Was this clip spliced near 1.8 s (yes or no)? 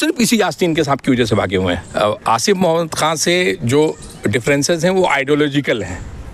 yes